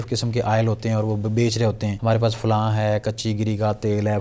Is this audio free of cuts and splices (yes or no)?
no